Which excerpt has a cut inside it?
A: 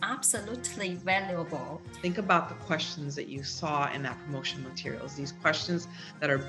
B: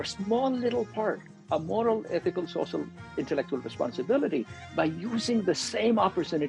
A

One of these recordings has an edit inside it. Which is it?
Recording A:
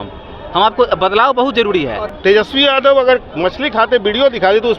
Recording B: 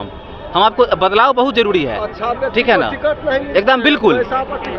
A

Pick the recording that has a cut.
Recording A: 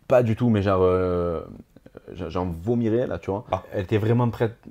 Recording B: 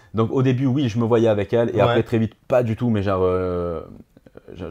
A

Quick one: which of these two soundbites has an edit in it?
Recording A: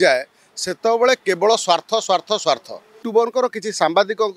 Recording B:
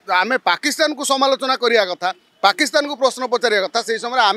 A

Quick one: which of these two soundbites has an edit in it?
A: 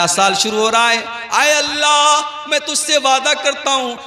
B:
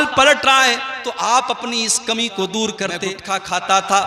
B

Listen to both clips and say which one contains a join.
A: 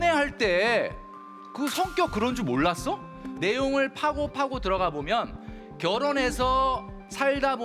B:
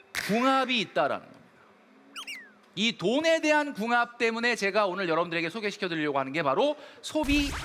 A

